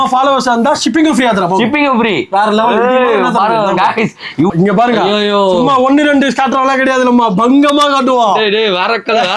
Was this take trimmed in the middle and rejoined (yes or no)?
yes